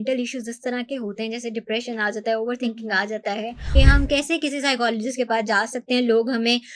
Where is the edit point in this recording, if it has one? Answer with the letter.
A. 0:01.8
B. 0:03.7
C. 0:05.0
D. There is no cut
B